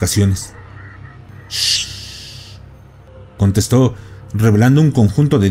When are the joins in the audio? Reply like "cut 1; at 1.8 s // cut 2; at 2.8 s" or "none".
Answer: cut 1; at 1.3 s // cut 2; at 3.1 s